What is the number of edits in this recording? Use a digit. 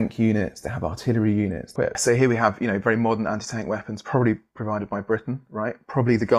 1